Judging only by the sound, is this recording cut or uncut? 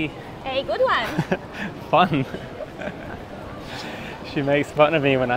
uncut